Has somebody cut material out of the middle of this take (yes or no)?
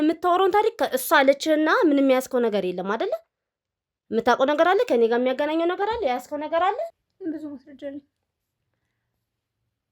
yes